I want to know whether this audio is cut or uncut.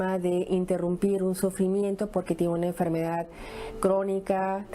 uncut